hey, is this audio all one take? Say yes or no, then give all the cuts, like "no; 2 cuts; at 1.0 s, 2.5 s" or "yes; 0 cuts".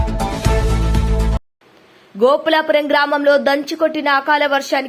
no; 1 cut; at 1.3 s